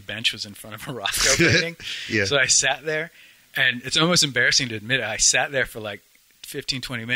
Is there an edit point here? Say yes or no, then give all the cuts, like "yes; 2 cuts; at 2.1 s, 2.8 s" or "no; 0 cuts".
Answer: no; 0 cuts